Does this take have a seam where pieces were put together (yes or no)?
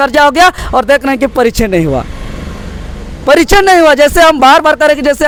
no